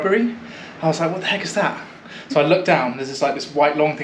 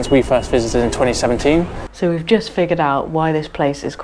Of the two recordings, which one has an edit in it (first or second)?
second